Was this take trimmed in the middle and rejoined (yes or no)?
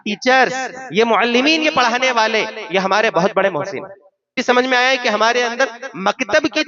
yes